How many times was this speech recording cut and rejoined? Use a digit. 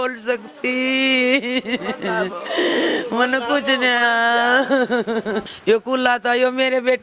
1